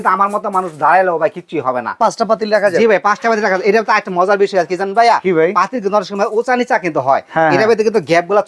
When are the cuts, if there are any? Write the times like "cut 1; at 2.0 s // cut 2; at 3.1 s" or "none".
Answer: cut 1; at 2.0 s